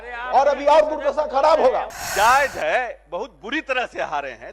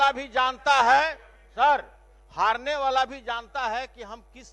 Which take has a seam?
first; 1 cut; at 2.0 s

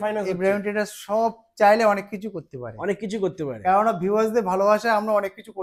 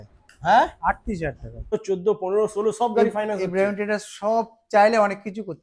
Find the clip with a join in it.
second; 1 cut; at 1.8 s

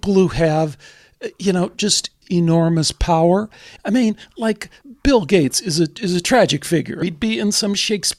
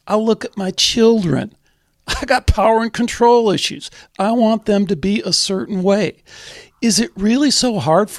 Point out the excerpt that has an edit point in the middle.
first; 4 cuts; at 2.2 s, 3.7 s, 4.8 s, 7.0 s

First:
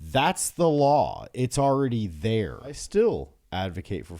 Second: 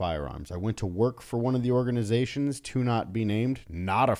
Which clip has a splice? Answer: first; 1 cut; at 2.8 s

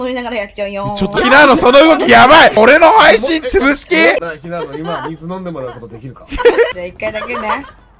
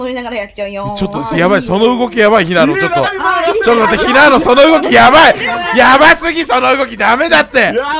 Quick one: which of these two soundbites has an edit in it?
first; 4 cuts; at 1.2 s, 2.6 s, 4.2 s, 6.7 s

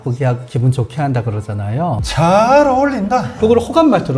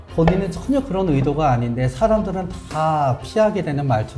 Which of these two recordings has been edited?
first; 1 cut; at 2.0 s

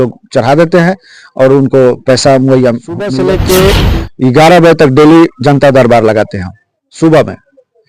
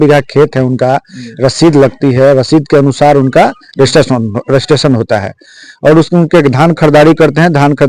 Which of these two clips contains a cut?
first; 1 cut; at 3.1 s

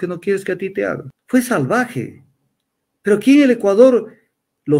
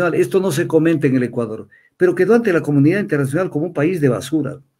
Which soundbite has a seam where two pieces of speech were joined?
first; 1 cut; at 1.1 s

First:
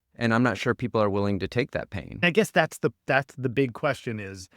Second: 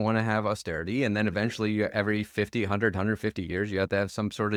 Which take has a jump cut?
first; 1 cut; at 2.2 s

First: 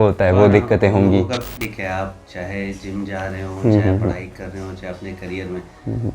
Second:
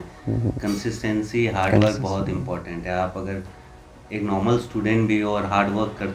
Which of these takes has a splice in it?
first; 1 cut; at 1.7 s

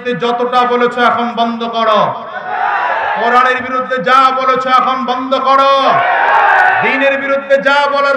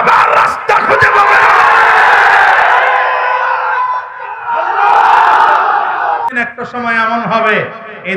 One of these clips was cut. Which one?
second; 1 cut; at 6.3 s

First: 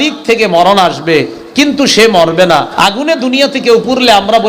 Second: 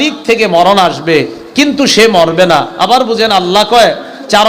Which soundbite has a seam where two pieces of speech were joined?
first; 1 cut; at 2.7 s

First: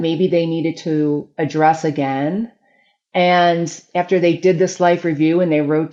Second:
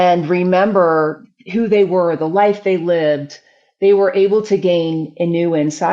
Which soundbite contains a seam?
second; 1 cut; at 1.2 s

